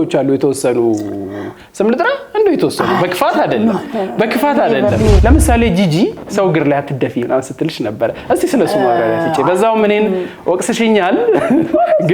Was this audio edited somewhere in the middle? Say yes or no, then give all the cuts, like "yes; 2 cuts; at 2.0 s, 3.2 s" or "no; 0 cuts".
yes; 1 cut; at 5.2 s